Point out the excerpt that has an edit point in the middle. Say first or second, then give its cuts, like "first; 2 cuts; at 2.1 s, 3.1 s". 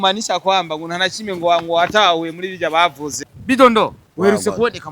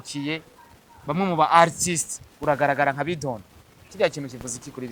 first; 1 cut; at 3.1 s